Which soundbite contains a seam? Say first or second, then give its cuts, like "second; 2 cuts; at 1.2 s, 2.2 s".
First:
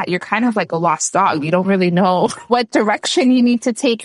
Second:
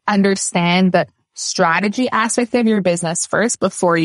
first; 1 cut; at 2.5 s